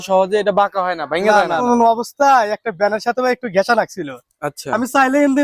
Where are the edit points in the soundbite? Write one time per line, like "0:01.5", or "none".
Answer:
0:01.6